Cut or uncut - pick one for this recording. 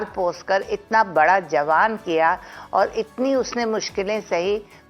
uncut